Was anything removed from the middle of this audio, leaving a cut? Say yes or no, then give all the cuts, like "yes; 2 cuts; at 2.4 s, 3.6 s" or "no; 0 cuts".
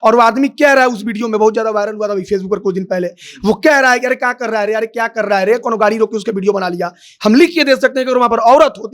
no; 0 cuts